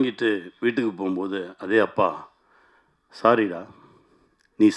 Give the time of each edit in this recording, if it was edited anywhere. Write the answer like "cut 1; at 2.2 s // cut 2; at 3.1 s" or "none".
none